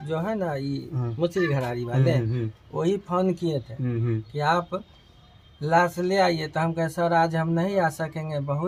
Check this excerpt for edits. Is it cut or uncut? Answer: uncut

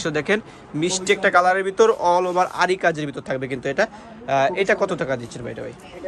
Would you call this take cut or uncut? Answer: uncut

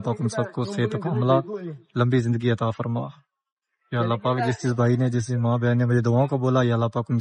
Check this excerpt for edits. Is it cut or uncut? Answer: uncut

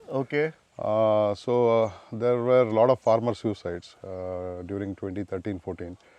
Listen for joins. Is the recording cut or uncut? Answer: uncut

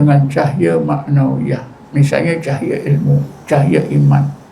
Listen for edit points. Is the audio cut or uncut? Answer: cut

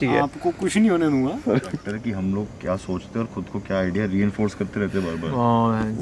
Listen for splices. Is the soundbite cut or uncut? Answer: cut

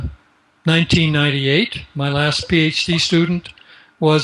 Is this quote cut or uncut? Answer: uncut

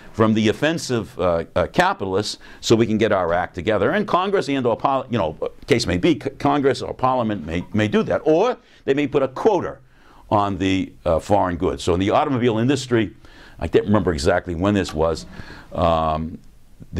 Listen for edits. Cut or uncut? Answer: uncut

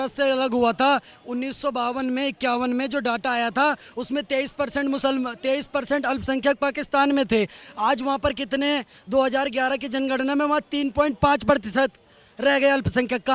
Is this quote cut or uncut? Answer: uncut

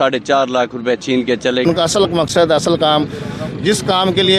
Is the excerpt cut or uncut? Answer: cut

